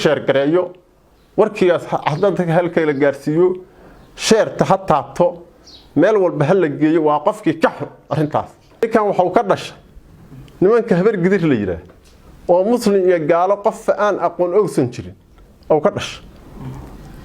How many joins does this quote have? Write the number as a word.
one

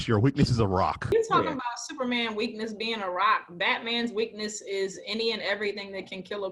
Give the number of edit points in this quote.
one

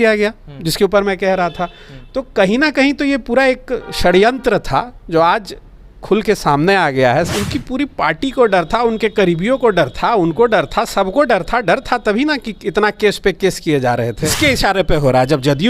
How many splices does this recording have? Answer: two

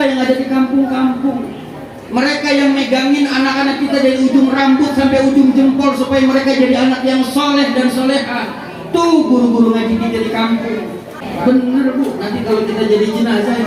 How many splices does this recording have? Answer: one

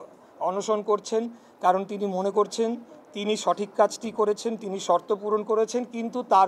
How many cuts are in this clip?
zero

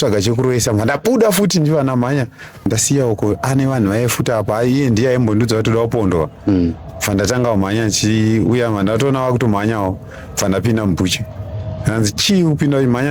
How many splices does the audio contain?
one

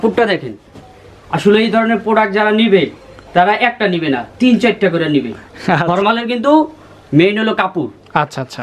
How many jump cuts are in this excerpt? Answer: one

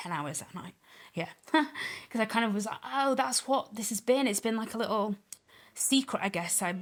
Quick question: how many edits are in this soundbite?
zero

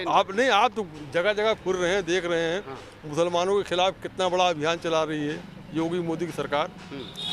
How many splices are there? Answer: zero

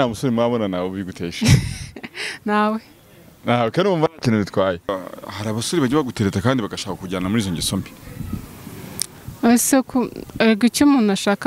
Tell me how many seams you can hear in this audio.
one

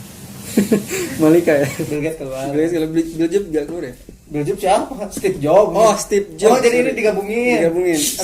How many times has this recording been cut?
one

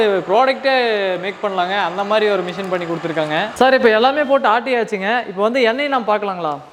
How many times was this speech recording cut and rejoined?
zero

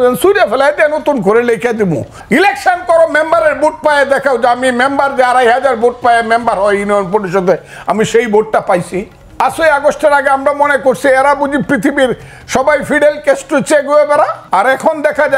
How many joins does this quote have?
three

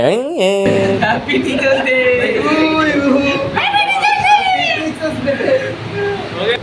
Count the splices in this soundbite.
one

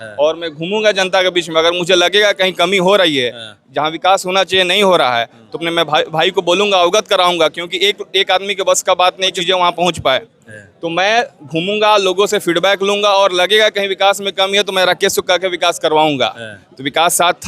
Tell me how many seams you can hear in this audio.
one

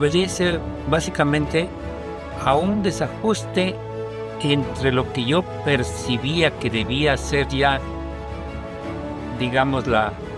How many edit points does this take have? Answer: zero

